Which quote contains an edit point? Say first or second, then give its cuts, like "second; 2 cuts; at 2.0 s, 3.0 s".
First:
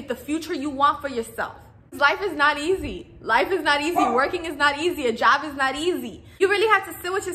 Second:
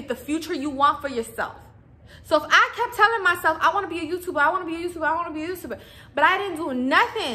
first; 1 cut; at 1.9 s